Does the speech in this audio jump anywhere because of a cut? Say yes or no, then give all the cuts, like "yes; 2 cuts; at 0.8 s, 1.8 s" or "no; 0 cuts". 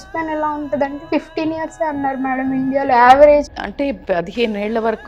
yes; 1 cut; at 3.5 s